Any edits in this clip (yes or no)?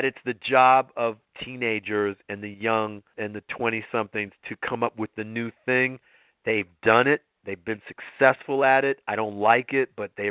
yes